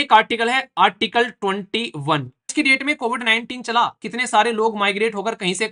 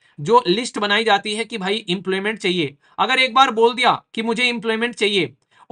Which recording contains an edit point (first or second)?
first